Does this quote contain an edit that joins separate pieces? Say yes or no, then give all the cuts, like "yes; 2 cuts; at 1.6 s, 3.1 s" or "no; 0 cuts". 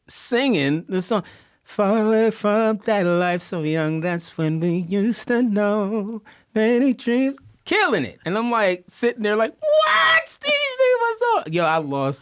no; 0 cuts